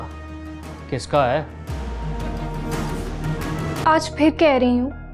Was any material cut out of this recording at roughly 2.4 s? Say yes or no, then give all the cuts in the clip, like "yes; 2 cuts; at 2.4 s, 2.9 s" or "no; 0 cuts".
no; 1 cut; at 3.8 s